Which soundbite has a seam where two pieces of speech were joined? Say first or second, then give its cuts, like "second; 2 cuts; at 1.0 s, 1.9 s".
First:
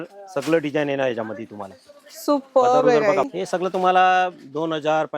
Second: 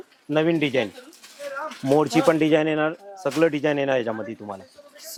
first; 1 cut; at 3.3 s